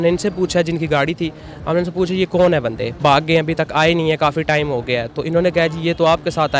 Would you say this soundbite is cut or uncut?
cut